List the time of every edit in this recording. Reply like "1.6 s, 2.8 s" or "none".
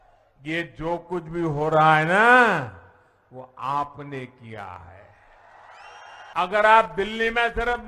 6.3 s